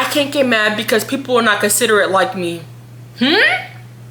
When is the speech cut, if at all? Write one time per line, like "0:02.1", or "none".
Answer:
none